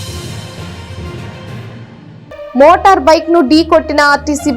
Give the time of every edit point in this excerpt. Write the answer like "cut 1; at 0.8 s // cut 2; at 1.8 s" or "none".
cut 1; at 1.9 s